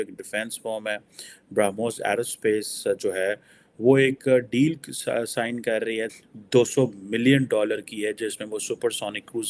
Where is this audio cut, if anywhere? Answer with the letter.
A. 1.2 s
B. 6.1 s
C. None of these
B